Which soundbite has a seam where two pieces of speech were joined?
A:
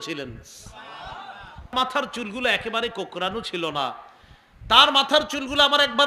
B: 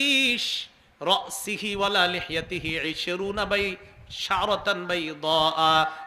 A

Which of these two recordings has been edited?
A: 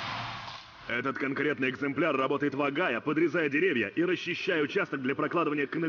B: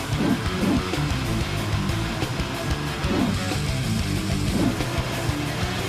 A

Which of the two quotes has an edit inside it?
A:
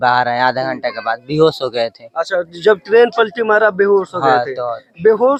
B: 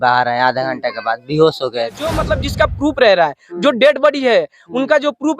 B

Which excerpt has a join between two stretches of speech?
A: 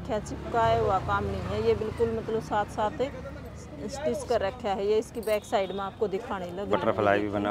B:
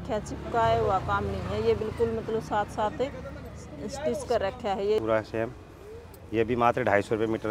B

